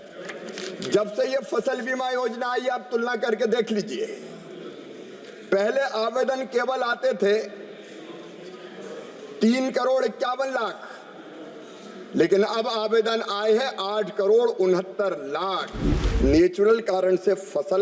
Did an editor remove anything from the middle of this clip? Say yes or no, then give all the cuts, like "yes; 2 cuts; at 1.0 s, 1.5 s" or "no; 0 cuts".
yes; 1 cut; at 16.0 s